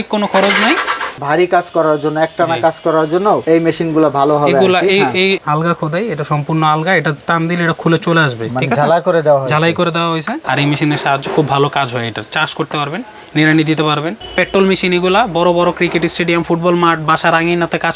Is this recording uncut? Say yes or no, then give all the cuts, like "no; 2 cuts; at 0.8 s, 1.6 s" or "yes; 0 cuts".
no; 4 cuts; at 1.2 s, 5.4 s, 10.4 s, 14.2 s